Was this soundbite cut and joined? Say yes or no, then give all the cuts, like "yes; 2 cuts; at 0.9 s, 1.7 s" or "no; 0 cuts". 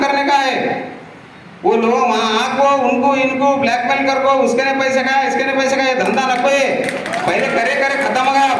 no; 0 cuts